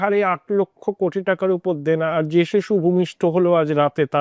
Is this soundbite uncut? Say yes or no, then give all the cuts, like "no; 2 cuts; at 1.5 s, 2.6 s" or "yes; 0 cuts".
yes; 0 cuts